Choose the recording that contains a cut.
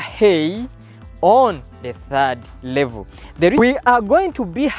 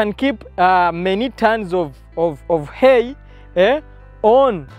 first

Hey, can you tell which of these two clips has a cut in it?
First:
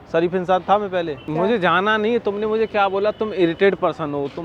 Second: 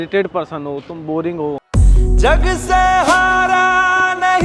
first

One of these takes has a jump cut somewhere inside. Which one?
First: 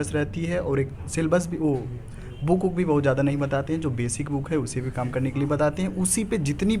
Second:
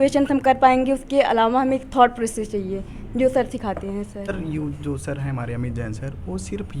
second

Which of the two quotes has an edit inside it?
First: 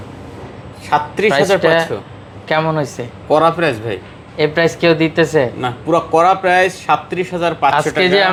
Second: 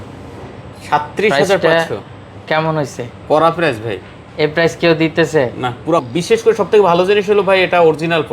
second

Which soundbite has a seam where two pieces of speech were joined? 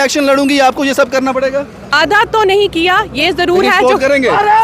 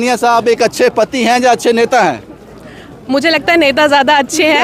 first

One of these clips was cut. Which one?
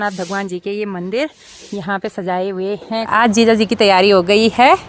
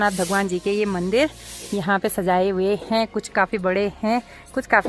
first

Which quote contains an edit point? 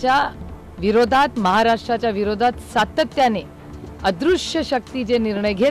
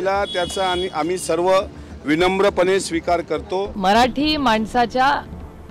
second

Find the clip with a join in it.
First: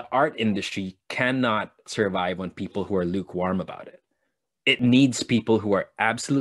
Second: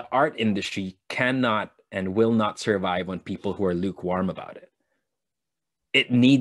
first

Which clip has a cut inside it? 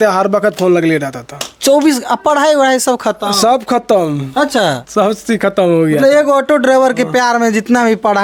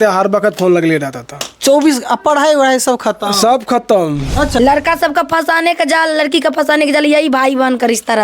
second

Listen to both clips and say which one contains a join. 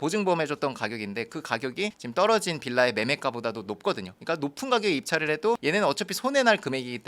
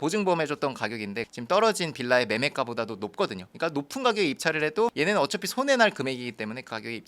second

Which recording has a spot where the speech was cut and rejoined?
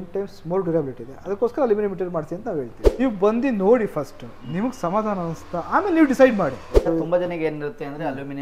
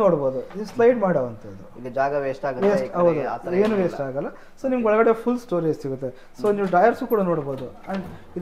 first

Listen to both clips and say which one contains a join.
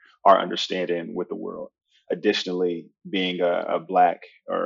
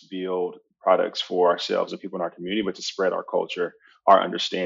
first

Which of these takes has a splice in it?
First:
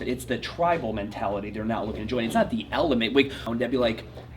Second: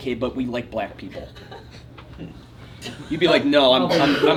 first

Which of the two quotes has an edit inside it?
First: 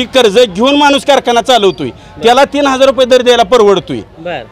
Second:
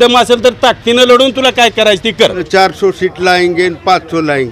second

